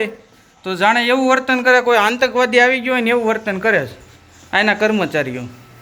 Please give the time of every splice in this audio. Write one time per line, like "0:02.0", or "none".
none